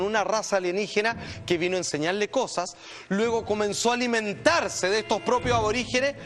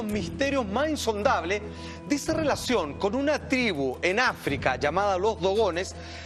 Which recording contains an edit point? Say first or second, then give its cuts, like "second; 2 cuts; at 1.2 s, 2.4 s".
first; 1 cut; at 3.9 s